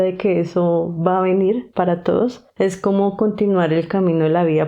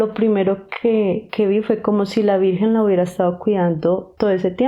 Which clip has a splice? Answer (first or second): first